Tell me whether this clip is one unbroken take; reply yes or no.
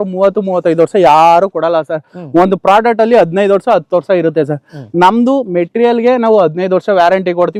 yes